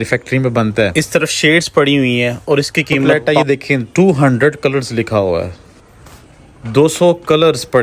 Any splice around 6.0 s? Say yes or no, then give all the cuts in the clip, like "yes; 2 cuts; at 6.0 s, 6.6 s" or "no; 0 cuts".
no; 2 cuts; at 0.9 s, 3.1 s